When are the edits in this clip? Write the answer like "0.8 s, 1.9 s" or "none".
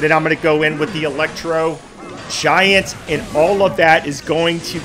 none